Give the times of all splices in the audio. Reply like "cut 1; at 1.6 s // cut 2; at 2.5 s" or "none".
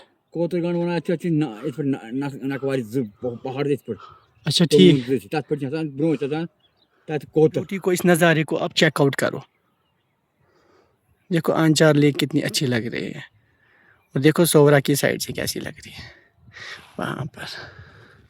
cut 1; at 7.7 s